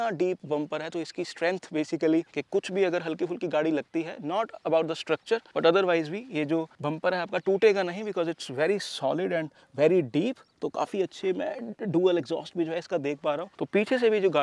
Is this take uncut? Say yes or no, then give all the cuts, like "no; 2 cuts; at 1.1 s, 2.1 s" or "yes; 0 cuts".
yes; 0 cuts